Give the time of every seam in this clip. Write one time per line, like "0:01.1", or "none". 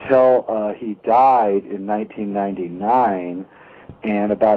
0:03.2